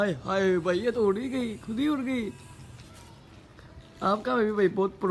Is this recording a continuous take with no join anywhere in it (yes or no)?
no